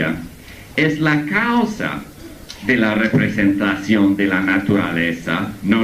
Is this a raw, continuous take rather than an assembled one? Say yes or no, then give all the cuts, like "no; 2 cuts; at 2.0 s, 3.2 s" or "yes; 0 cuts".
yes; 0 cuts